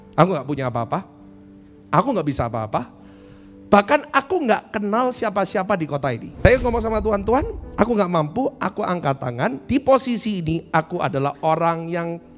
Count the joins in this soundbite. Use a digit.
1